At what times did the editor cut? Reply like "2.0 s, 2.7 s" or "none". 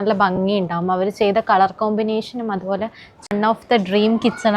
3.1 s